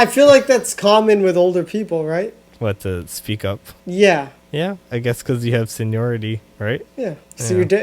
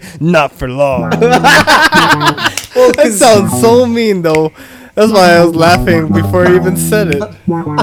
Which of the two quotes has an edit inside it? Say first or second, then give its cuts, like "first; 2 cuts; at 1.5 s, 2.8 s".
first; 4 cuts; at 2.4 s, 3.7 s, 4.4 s, 6.9 s